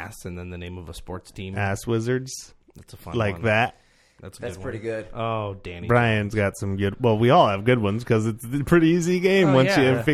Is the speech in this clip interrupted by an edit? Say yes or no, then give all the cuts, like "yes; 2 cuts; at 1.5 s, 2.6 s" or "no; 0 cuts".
no; 0 cuts